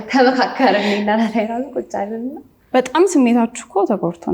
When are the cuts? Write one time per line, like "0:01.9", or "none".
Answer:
0:02.6

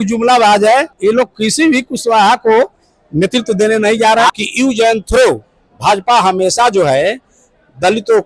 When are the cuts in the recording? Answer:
0:00.9
0:04.4

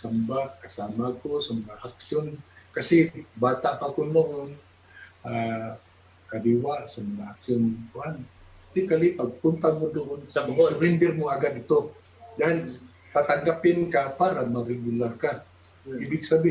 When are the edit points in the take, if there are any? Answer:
0:08.7

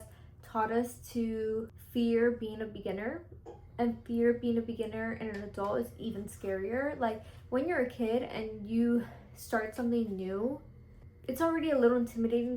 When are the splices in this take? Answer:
0:01.8

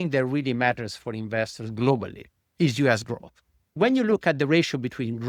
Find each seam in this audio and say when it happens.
0:03.7

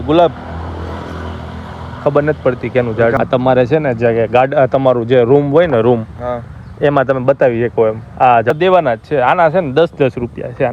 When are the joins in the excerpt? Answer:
0:03.2
0:08.5

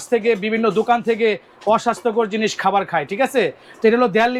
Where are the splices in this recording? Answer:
none

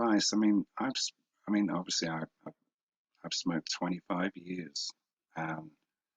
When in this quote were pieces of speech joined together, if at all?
0:03.7

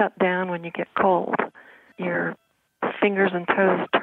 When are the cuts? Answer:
0:01.8

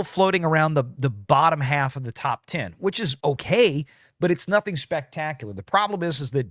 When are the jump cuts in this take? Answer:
0:01.0

